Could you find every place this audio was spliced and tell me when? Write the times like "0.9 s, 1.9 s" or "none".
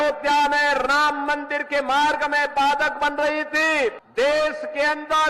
4.0 s